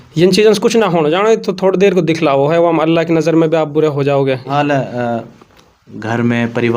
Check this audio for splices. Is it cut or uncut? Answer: cut